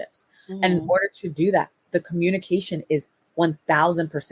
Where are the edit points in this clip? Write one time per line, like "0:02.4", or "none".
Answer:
none

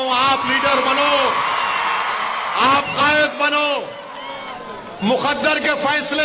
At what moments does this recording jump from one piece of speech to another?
none

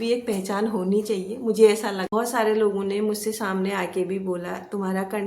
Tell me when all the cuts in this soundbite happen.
0:02.1

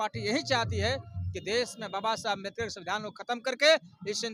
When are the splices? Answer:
none

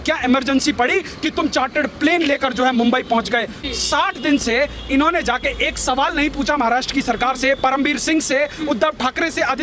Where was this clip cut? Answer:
0:03.6

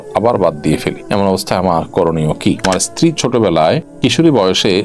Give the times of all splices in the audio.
0:01.0
0:02.6
0:03.9

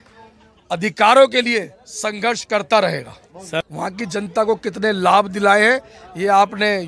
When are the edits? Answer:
0:03.6

